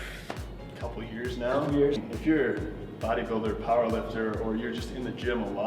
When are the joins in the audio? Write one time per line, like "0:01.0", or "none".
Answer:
0:02.0

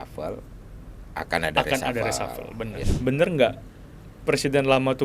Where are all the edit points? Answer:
0:02.8

